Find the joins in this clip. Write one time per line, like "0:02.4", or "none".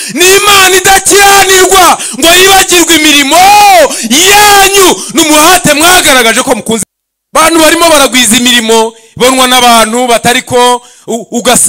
0:06.9